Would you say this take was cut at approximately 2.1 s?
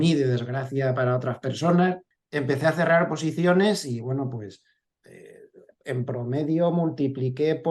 yes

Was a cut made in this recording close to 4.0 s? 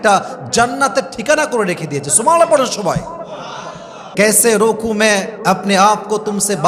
yes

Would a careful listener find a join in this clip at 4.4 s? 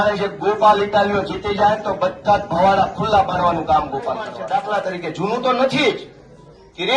yes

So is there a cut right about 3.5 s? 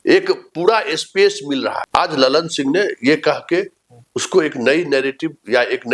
no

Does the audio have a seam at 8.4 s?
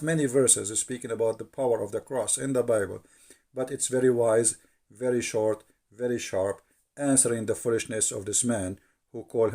no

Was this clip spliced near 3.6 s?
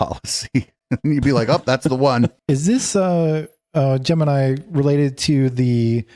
no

